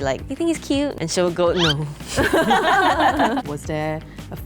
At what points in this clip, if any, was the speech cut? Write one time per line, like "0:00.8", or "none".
0:01.0
0:03.4